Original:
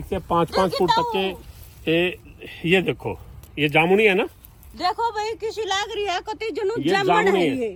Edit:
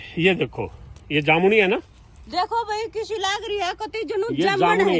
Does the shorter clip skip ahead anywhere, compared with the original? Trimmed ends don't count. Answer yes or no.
no